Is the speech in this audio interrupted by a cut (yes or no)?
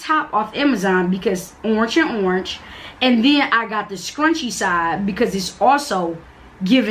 no